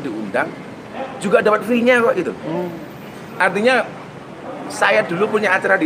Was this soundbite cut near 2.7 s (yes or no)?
no